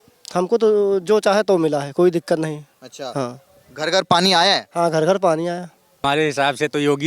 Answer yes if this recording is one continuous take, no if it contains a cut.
no